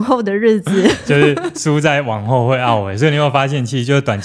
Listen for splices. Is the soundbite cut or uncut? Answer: uncut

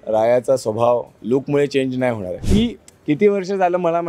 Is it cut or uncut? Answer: cut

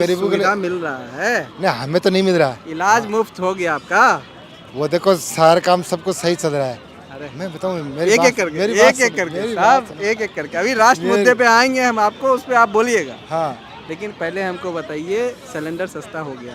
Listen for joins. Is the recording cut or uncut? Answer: uncut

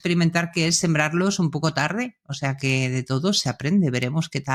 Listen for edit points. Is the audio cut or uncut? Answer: uncut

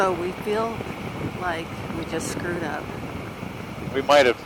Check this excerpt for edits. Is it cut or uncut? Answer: uncut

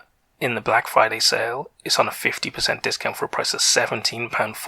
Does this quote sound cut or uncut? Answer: uncut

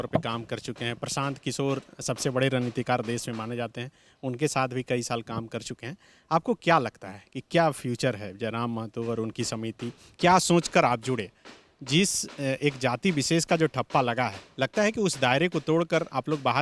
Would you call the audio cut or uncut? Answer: uncut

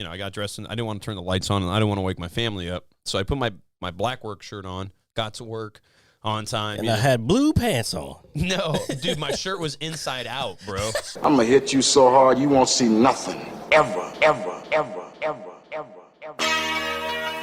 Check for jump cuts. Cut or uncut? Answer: cut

